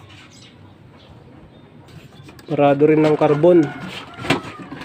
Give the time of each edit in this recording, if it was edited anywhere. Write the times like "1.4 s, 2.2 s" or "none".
1.8 s